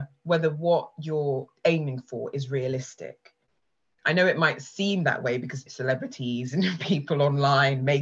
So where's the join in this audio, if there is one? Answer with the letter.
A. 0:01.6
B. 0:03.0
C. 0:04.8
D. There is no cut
D